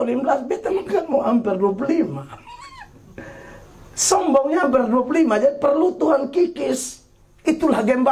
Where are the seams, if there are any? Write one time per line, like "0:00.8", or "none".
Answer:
none